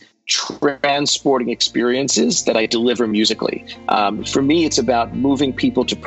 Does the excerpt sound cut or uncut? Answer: uncut